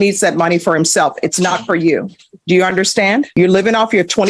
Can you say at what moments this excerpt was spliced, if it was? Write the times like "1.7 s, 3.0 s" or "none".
3.3 s